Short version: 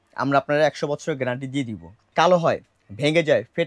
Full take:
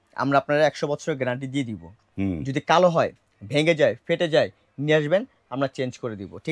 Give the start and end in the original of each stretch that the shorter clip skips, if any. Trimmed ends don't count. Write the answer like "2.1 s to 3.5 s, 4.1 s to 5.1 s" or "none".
2.1 s to 2.6 s